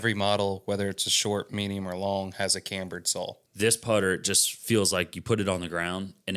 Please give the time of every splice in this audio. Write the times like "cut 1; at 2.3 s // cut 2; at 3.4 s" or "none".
cut 1; at 3.4 s